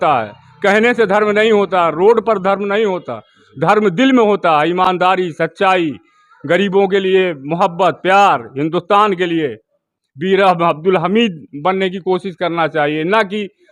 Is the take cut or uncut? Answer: uncut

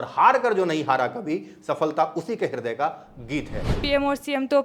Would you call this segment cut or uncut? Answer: cut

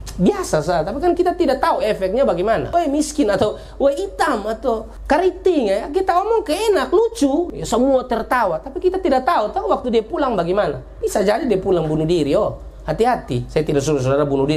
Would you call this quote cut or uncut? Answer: cut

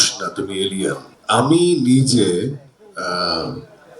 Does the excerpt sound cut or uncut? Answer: cut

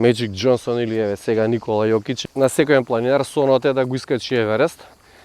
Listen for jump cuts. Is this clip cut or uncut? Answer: cut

